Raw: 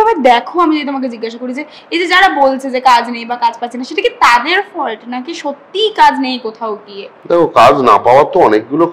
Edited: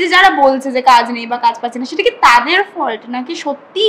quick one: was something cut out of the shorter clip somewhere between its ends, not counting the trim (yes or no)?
no